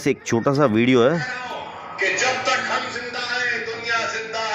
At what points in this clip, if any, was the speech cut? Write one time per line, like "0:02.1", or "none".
0:01.1